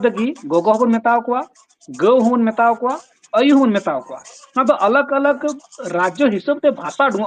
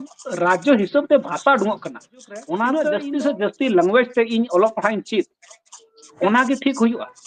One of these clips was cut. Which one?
second; 2 cuts; at 2.9 s, 6.1 s

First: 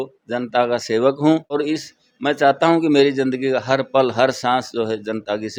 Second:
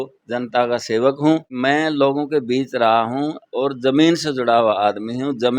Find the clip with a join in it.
second; 1 cut; at 1.5 s

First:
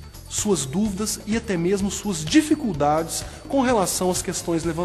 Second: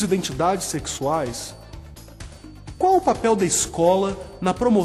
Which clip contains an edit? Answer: first; 1 cut; at 1.8 s

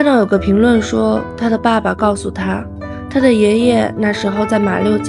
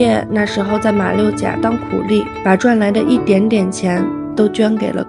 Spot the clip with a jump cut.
second; 1 cut; at 2.3 s

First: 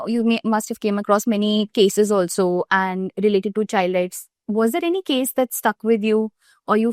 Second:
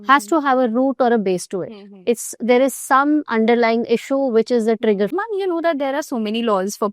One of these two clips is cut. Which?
second; 1 cut; at 5.1 s

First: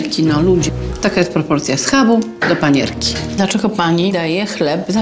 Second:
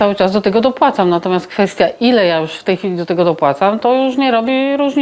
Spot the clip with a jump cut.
first; 1 cut; at 3.2 s

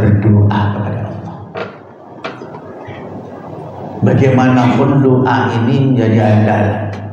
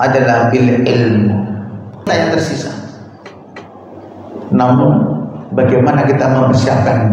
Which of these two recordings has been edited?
second; 1 cut; at 2.1 s

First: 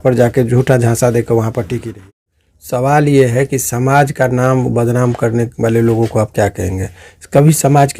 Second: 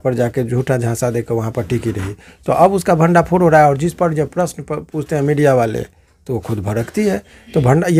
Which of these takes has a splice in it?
first; 1 cut; at 1.9 s

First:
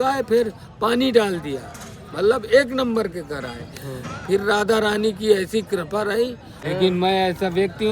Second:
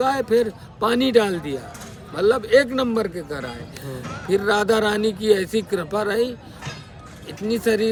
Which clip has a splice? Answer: first; 1 cut; at 6.5 s

